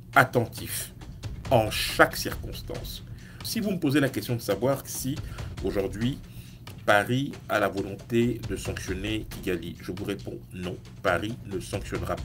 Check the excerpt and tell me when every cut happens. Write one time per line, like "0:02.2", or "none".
0:03.4